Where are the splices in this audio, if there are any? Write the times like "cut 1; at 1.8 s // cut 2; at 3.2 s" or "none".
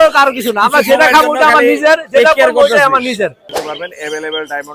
cut 1; at 3.5 s